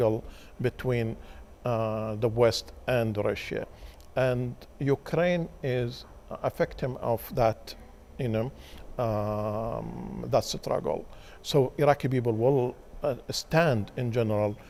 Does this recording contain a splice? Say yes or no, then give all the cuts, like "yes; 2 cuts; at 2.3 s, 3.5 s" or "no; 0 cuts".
no; 0 cuts